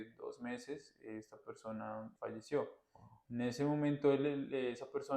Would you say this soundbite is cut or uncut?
cut